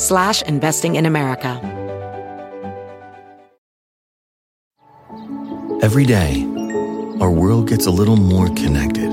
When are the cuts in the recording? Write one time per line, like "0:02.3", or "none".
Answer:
0:01.6